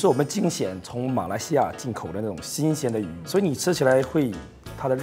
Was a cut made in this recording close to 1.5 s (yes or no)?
no